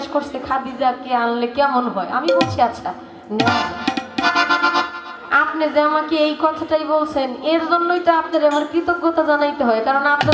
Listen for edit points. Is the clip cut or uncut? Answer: uncut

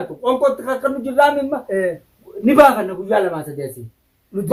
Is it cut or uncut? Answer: uncut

